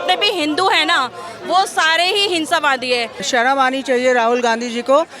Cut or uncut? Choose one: cut